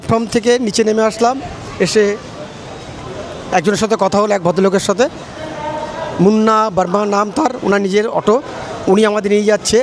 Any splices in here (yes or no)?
no